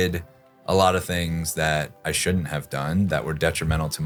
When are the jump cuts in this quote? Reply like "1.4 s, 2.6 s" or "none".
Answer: none